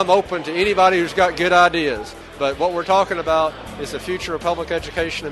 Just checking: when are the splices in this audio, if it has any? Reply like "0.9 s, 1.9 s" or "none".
2.2 s